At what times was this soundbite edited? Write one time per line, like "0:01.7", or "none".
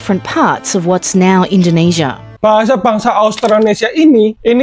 0:02.2